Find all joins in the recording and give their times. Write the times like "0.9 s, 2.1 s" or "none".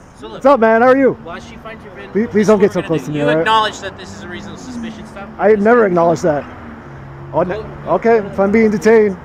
none